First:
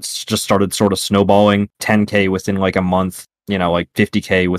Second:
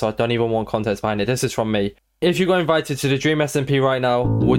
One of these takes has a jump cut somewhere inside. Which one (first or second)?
first